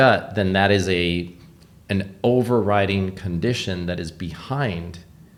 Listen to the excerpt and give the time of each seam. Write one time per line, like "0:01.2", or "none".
none